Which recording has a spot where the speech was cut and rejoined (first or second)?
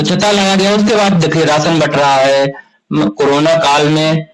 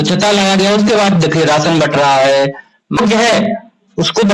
second